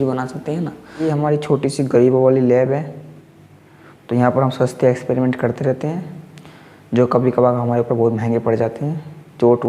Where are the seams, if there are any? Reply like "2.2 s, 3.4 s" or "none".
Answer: 1.1 s